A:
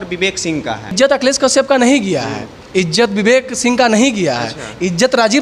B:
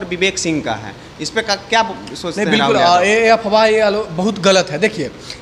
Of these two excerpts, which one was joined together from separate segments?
A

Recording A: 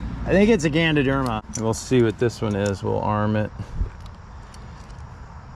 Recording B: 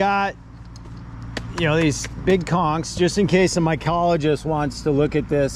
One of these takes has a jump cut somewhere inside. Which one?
A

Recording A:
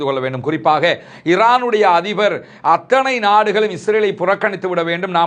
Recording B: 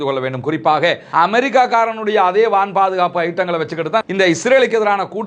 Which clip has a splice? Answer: B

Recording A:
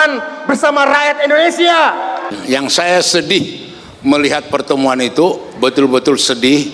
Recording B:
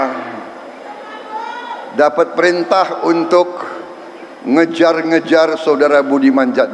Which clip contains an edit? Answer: A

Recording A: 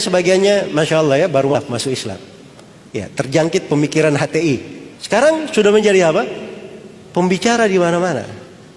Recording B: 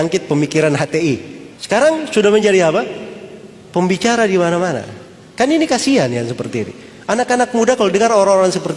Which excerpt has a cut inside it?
A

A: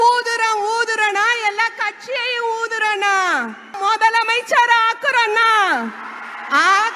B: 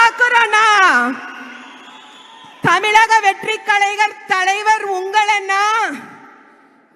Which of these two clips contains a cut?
A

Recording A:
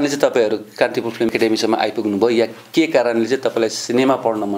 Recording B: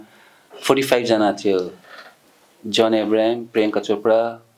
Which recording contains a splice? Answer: A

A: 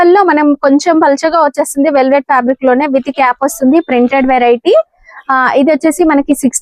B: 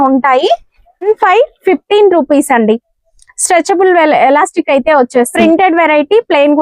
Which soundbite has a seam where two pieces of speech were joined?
B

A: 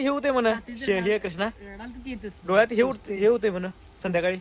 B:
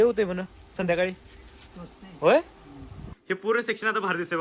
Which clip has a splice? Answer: B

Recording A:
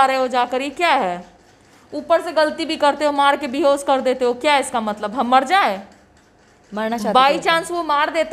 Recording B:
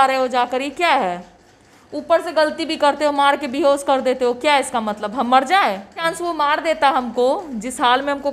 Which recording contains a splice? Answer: B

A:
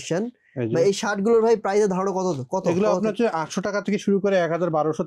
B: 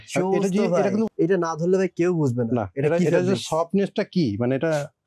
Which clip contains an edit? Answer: B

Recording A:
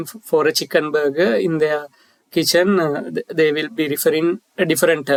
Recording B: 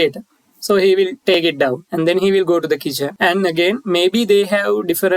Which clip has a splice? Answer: B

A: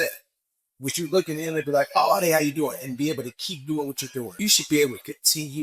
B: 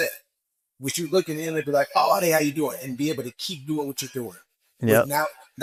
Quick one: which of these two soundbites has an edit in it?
A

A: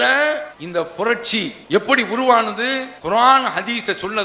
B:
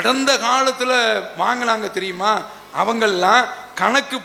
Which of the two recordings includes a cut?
A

